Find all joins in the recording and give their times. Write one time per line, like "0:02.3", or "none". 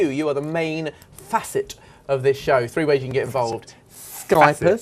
0:02.4